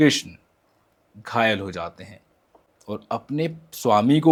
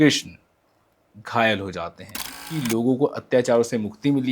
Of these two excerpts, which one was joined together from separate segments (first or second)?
second